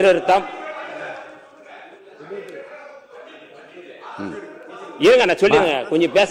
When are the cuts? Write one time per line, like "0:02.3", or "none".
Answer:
none